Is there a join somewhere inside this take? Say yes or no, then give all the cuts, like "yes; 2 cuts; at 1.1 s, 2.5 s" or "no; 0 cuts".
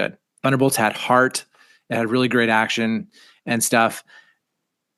no; 0 cuts